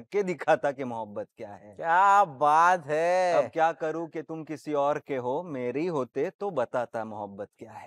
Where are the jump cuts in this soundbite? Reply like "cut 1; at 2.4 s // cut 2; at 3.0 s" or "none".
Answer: none